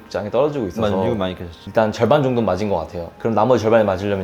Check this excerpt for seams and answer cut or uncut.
cut